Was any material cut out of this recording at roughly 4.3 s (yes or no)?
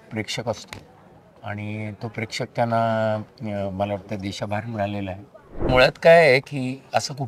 no